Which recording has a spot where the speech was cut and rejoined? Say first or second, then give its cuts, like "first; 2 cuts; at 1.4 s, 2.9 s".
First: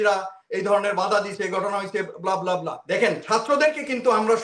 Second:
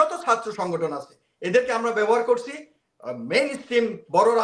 first; 1 cut; at 2.8 s